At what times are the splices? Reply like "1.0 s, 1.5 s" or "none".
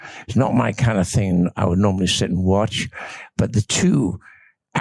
none